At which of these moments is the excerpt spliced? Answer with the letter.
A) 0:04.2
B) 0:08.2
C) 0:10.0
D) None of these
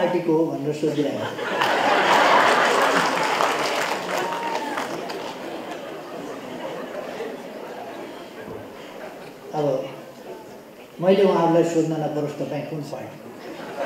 D